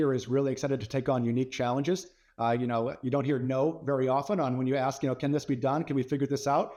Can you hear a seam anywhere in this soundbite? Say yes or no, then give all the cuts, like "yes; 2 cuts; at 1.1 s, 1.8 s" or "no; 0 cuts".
no; 0 cuts